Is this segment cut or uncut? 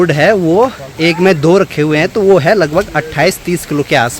uncut